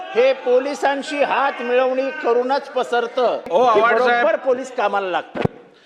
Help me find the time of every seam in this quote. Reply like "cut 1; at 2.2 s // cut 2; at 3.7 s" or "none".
cut 1; at 3.5 s